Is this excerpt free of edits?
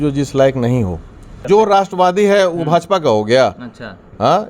no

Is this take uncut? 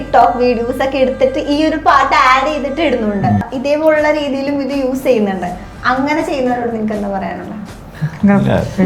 no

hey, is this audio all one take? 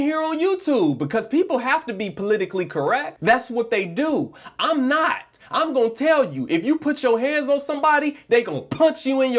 yes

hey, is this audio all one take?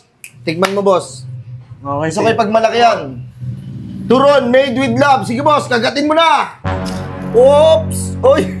yes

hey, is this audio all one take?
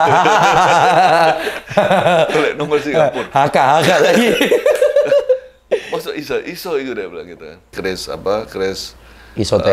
no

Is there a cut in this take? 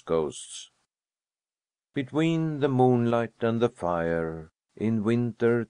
yes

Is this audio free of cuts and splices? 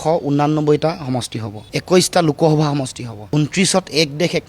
no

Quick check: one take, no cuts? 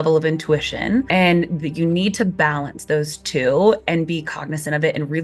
no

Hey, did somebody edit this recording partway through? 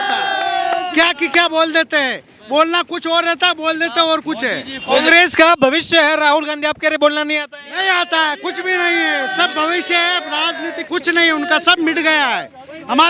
no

